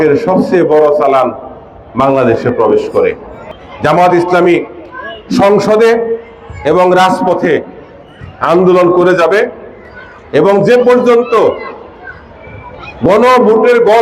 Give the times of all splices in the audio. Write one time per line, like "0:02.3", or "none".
0:03.6